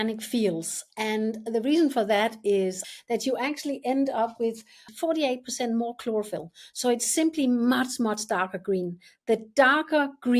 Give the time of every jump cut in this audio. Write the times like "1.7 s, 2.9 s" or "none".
2.9 s, 4.9 s